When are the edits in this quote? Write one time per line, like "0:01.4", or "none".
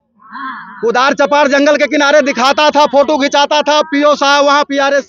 none